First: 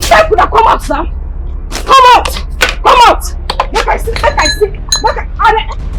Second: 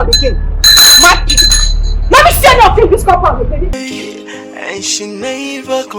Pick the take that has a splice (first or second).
second